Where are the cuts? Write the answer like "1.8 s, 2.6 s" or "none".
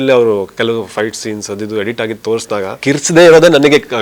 2.8 s